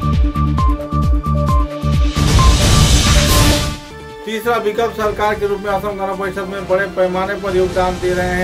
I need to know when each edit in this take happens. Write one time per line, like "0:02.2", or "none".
0:03.5